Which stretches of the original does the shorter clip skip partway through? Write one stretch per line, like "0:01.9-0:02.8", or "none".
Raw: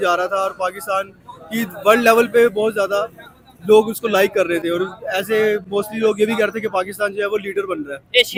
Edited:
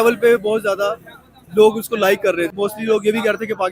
0:04.6-0:05.7